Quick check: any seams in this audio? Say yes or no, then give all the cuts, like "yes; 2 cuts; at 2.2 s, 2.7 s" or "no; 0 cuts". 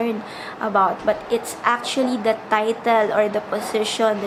no; 0 cuts